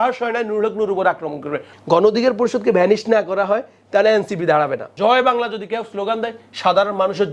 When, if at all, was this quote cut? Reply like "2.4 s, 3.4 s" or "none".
1.7 s, 4.9 s